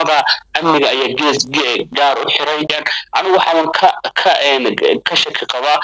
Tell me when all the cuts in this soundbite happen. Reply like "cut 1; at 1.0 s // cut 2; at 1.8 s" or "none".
cut 1; at 2.8 s

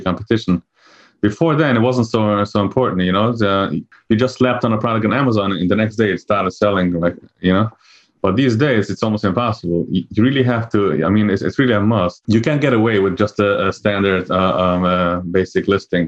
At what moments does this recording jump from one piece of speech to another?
cut 1; at 12.2 s

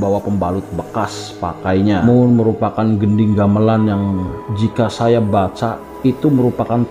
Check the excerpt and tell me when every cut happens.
cut 1; at 2.0 s

